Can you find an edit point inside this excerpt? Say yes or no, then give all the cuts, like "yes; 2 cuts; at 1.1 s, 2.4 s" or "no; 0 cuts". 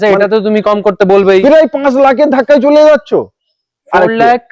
no; 0 cuts